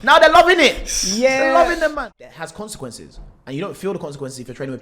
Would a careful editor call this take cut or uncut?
cut